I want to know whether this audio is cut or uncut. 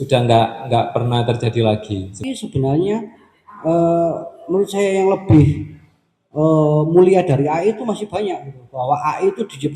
cut